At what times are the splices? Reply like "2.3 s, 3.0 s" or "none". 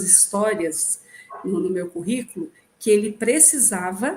none